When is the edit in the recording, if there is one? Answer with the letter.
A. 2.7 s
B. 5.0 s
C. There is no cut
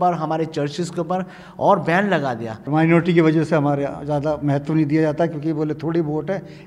A